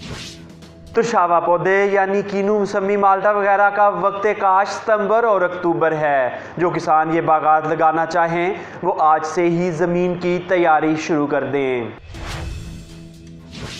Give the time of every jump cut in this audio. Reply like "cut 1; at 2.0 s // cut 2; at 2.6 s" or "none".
cut 1; at 11.9 s